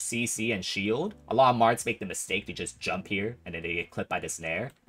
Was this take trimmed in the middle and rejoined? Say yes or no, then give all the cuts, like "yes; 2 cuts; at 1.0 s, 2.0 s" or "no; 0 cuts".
no; 0 cuts